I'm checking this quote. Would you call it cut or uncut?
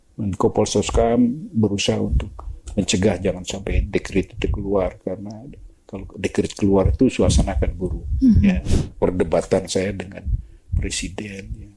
cut